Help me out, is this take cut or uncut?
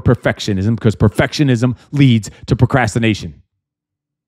uncut